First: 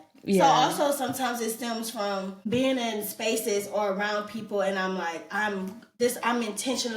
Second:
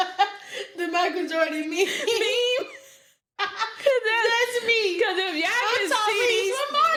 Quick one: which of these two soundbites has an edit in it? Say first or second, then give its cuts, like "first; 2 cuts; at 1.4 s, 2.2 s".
first; 1 cut; at 2.4 s